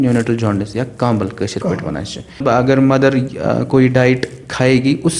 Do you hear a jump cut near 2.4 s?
yes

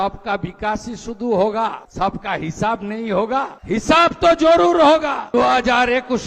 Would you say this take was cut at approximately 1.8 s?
yes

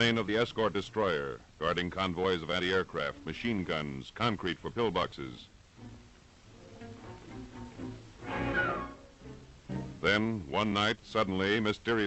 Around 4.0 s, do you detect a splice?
yes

